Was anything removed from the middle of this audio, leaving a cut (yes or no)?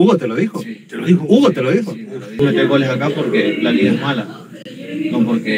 yes